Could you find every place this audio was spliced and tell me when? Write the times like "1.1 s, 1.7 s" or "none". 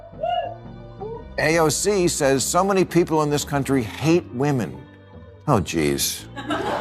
1.1 s